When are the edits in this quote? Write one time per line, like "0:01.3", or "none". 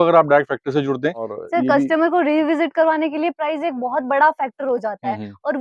0:01.4